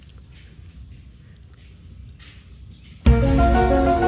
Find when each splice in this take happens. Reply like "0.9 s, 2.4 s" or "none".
3.0 s